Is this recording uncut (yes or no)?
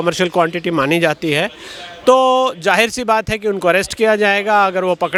yes